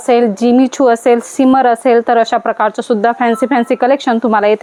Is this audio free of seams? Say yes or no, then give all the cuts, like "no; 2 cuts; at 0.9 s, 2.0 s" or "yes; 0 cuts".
yes; 0 cuts